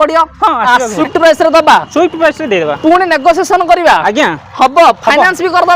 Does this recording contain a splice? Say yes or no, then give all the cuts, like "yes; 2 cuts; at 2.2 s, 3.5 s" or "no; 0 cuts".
yes; 1 cut; at 0.9 s